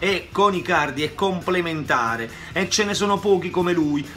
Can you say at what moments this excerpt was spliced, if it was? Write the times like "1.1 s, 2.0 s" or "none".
none